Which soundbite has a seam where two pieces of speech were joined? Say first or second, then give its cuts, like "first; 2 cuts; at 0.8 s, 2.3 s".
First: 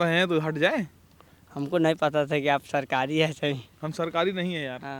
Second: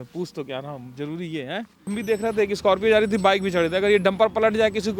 second; 1 cut; at 2.0 s